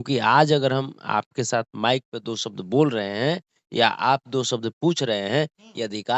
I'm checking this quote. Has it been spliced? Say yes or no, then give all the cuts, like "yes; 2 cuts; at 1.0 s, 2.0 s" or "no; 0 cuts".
no; 0 cuts